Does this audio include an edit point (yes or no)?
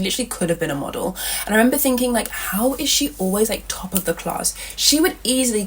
no